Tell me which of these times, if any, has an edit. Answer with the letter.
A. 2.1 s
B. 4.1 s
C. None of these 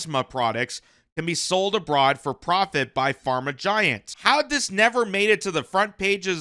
B